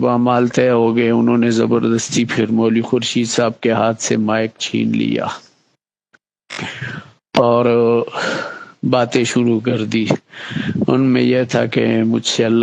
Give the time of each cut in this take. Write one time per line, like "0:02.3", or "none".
none